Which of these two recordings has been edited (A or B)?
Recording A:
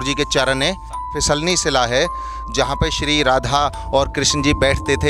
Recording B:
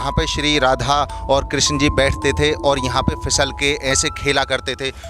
A